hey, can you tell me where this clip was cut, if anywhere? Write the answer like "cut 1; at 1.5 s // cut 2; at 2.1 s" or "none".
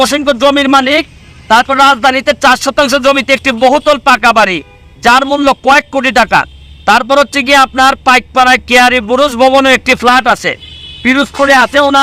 none